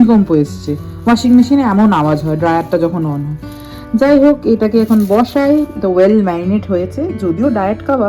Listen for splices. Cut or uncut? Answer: uncut